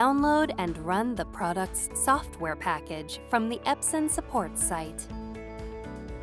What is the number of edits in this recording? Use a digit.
1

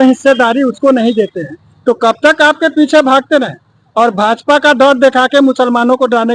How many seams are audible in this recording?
0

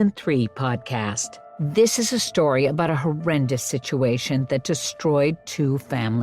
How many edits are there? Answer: 1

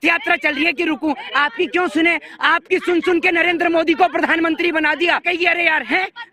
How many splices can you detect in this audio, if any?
1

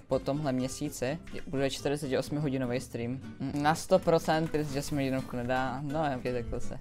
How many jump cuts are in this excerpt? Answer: 1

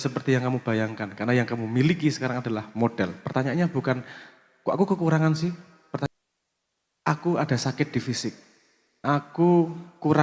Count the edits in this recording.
1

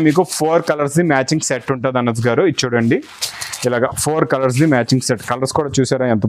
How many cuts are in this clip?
0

